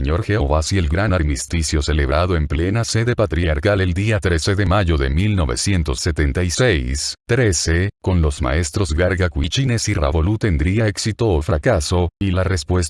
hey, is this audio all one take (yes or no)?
yes